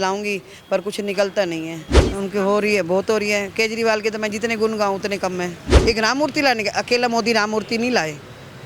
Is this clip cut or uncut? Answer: cut